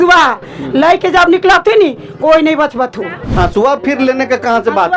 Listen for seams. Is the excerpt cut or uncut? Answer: cut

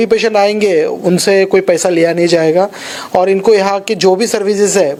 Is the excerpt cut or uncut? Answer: uncut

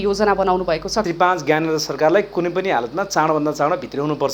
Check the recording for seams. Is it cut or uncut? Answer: cut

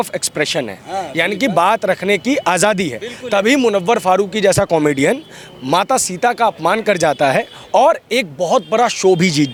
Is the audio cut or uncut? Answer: uncut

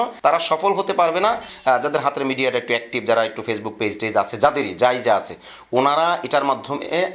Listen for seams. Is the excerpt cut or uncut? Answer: cut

